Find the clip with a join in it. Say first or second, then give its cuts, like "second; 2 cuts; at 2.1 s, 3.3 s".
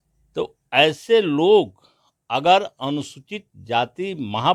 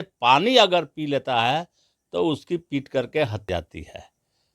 second; 1 cut; at 3.5 s